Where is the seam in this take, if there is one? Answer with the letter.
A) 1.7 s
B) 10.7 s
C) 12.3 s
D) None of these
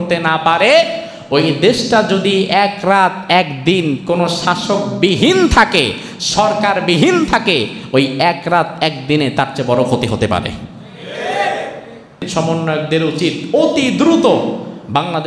C